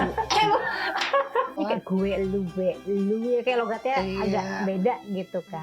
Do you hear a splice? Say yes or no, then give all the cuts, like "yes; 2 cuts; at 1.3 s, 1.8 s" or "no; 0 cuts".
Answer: yes; 1 cut; at 1.6 s